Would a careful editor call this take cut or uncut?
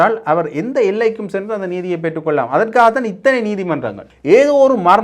cut